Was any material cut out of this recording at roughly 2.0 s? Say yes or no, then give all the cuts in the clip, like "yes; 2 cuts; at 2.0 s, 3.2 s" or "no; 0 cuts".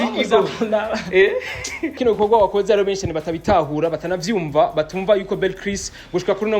yes; 1 cut; at 2.0 s